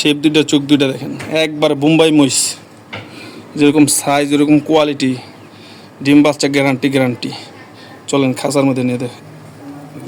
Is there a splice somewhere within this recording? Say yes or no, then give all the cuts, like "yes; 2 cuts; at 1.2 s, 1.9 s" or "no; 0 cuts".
no; 0 cuts